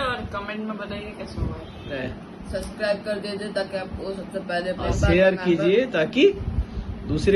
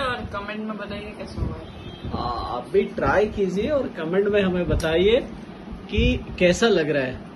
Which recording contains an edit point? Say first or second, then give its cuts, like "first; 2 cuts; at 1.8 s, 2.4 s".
first; 2 cuts; at 2.0 s, 4.9 s